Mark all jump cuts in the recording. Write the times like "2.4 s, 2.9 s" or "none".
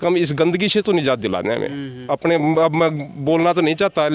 1.9 s